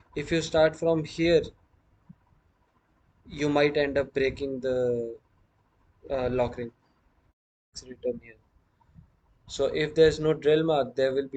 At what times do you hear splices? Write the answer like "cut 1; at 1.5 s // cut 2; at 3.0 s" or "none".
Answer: cut 1; at 7.7 s